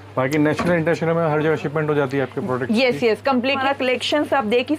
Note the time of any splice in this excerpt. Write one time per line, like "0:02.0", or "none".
0:03.6